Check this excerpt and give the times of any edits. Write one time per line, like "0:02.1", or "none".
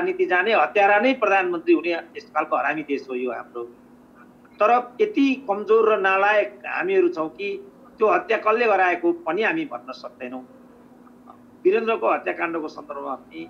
none